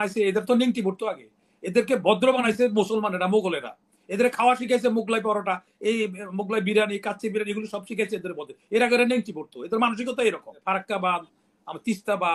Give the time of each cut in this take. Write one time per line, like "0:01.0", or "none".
0:10.5